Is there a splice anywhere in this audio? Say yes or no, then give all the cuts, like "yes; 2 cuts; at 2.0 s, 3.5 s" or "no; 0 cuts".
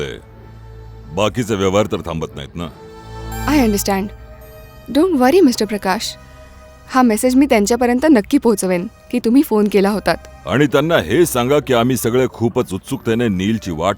yes; 1 cut; at 10.3 s